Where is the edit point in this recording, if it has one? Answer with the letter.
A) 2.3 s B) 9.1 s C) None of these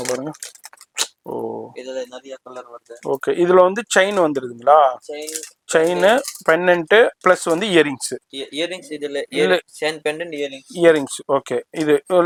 C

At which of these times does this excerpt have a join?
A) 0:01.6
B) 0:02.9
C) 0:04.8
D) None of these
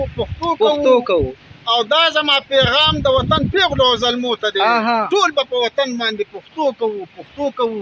D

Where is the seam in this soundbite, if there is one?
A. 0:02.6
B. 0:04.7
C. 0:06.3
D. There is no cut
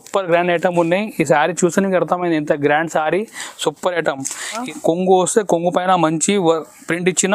B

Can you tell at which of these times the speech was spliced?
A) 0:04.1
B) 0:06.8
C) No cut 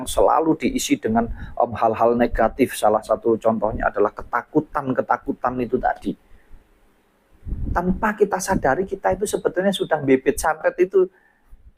C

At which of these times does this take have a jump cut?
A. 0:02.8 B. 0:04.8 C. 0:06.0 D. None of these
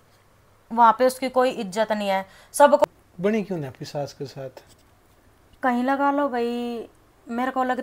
A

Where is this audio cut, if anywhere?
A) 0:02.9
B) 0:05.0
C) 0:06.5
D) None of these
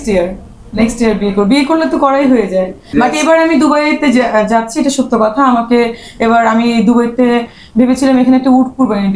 A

